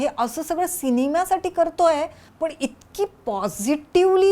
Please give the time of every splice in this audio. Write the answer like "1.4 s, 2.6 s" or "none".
2.2 s